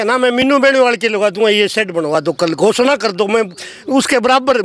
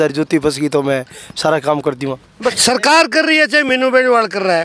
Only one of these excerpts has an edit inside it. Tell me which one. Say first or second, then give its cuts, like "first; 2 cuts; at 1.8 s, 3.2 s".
second; 1 cut; at 2.6 s